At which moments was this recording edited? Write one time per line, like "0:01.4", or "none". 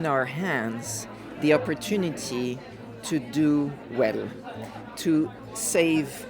0:05.4